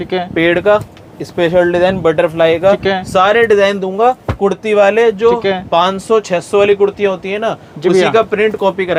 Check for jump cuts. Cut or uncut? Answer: uncut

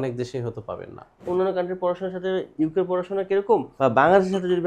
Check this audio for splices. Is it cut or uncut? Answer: cut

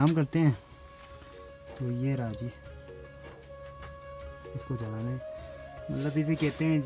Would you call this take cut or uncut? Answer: uncut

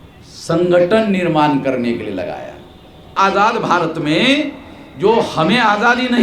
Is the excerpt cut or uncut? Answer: cut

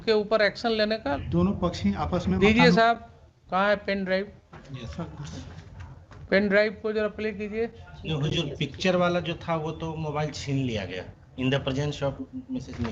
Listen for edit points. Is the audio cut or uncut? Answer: cut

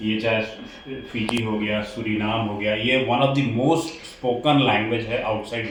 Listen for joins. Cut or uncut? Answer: uncut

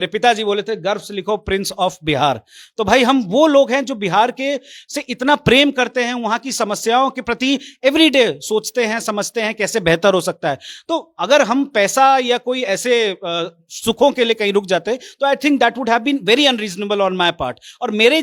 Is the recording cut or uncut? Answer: uncut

